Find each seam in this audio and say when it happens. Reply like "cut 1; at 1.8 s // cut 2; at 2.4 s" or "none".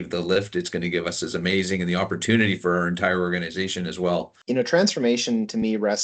cut 1; at 4.4 s